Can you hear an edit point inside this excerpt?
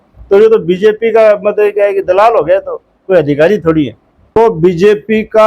yes; 1 cut; at 4.3 s

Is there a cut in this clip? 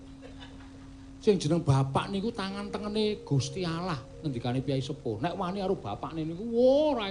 no; 0 cuts

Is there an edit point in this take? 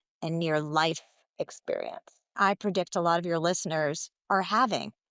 yes; 1 cut; at 2.3 s

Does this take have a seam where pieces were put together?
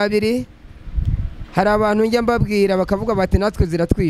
no; 0 cuts

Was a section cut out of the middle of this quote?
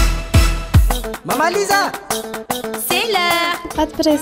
no; 0 cuts

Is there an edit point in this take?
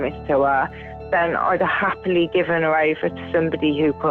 no; 0 cuts

